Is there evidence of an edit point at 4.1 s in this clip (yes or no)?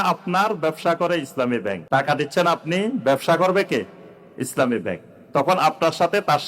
no